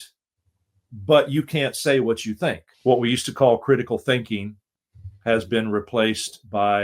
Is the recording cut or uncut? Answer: cut